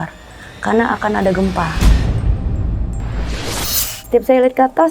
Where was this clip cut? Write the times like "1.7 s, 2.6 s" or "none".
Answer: 1.7 s, 3.9 s

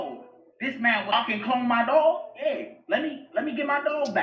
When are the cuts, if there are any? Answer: 1.1 s

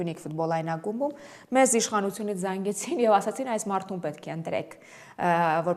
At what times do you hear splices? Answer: none

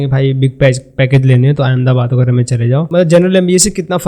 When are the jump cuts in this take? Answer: 2.9 s

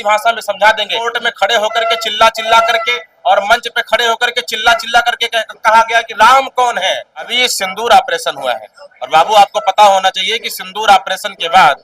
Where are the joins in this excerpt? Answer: 1.2 s, 7.3 s

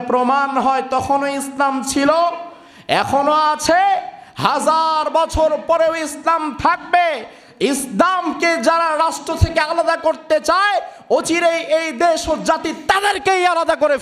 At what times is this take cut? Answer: none

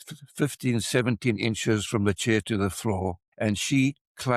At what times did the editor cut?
3.3 s

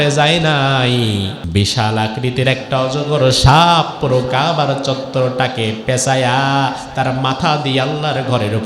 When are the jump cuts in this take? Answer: 1.4 s

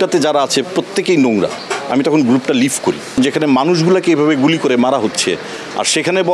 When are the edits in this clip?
3.1 s

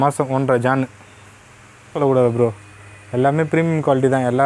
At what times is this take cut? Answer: 1.9 s

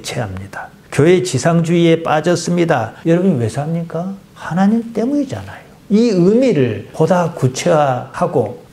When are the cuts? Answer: 2.9 s

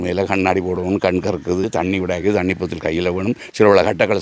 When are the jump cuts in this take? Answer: 1.7 s

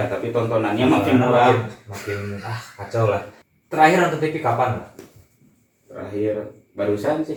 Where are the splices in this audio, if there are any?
none

